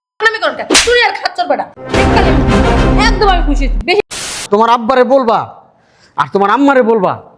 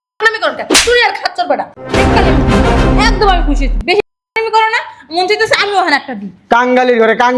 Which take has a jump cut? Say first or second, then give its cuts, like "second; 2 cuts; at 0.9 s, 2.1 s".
first; 1 cut; at 4.4 s